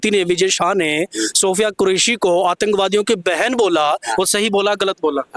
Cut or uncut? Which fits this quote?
uncut